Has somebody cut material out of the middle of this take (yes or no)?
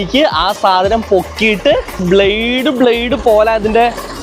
yes